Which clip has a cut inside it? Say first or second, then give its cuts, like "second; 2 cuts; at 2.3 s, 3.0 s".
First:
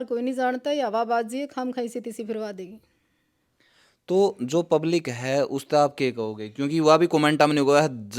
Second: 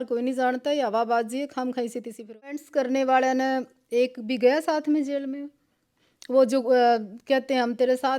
second; 1 cut; at 2.7 s